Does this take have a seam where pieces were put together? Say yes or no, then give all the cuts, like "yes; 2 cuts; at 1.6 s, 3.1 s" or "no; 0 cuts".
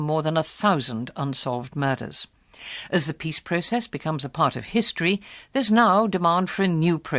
yes; 1 cut; at 4.6 s